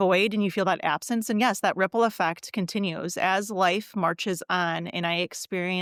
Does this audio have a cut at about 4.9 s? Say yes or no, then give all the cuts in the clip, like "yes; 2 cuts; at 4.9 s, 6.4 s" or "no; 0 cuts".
no; 0 cuts